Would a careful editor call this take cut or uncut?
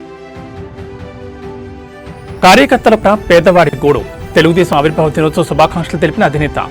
cut